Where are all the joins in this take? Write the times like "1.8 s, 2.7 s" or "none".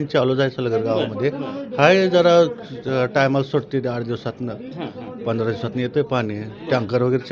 none